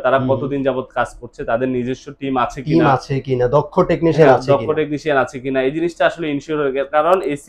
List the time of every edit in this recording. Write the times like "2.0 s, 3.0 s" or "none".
none